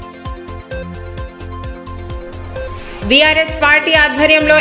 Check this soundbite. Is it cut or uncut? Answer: cut